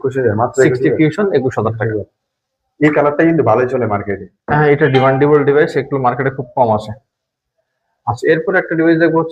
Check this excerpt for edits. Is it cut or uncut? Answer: uncut